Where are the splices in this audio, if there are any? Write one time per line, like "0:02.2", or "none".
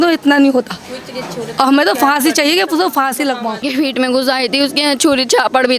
0:03.7